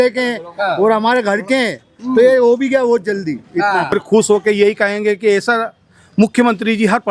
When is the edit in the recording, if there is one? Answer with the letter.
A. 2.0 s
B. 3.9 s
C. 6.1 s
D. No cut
B